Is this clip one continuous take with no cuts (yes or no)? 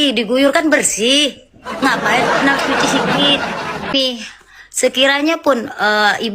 no